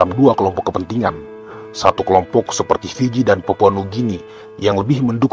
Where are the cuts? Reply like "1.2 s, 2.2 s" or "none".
none